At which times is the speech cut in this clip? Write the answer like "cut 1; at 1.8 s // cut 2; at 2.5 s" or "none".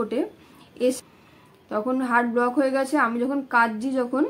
cut 1; at 1.0 s